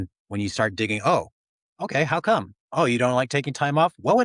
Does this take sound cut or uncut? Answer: uncut